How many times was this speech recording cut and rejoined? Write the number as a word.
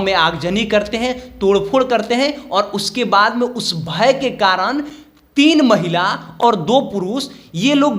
one